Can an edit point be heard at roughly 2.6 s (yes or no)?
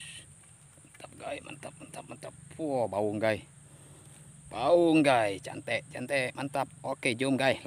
no